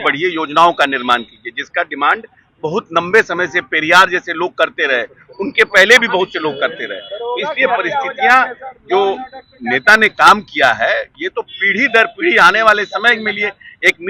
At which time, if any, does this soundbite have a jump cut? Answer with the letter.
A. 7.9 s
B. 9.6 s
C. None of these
C